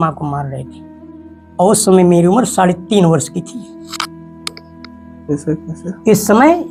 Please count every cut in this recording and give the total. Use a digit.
0